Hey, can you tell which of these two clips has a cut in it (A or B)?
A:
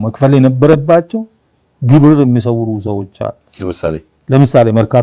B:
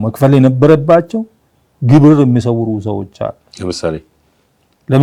A